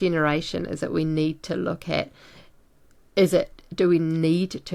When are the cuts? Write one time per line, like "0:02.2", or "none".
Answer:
none